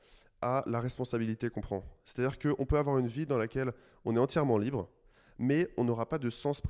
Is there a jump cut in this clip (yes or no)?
no